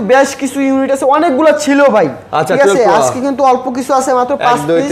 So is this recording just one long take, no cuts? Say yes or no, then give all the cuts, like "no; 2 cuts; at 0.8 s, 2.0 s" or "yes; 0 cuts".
yes; 0 cuts